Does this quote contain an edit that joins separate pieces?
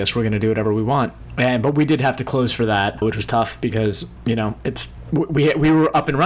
yes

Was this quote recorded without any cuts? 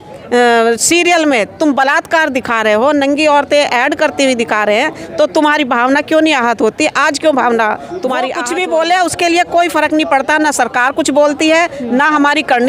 no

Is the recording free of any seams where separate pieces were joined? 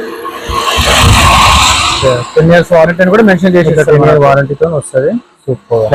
yes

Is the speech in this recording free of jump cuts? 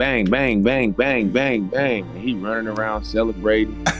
yes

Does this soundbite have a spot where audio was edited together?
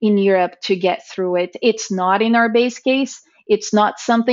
no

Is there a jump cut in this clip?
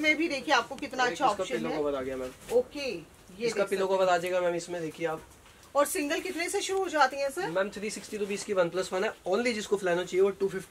no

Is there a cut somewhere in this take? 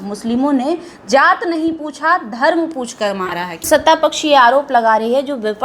yes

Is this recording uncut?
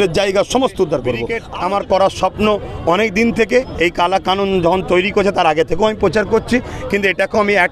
no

